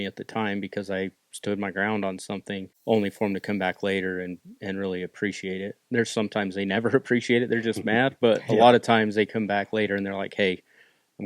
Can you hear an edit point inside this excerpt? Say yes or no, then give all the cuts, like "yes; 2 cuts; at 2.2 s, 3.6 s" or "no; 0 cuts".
yes; 1 cut; at 2.7 s